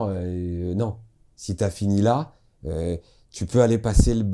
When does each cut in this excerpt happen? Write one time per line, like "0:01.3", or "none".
none